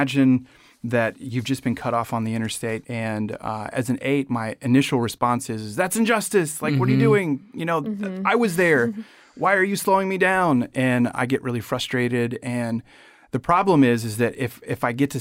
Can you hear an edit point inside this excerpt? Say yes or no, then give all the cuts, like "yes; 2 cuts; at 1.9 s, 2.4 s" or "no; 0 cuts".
yes; 1 cut; at 2.8 s